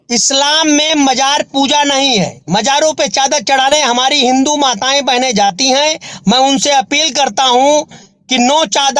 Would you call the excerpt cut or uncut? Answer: uncut